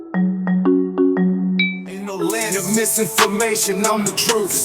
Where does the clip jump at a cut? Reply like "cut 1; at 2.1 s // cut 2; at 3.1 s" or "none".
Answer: cut 1; at 2.0 s